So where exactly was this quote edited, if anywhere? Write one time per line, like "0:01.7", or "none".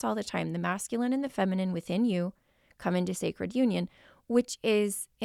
none